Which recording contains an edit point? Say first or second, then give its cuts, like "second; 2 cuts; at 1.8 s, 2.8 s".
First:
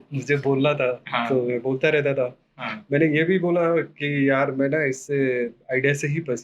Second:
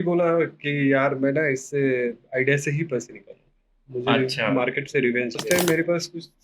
second; 1 cut; at 5.4 s